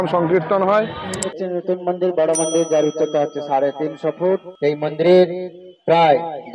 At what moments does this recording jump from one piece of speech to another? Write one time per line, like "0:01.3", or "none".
0:01.2
0:04.4